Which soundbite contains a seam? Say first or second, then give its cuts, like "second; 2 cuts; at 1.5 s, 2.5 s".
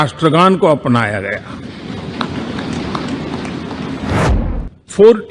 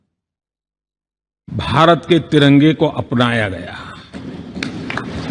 first; 1 cut; at 4.3 s